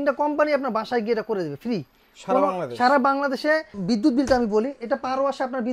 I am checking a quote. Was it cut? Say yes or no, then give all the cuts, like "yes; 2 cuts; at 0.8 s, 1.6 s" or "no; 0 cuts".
yes; 1 cut; at 3.8 s